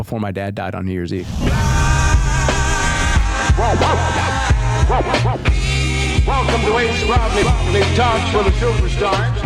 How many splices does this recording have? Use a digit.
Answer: 1